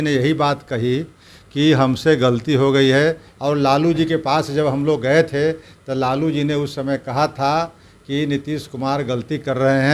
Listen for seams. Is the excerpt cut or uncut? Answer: cut